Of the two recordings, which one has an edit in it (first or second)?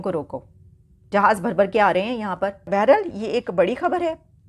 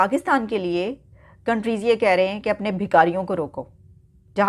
first